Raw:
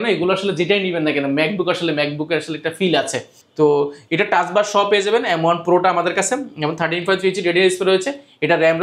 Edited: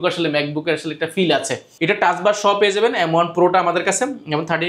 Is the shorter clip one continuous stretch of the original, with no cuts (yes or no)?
no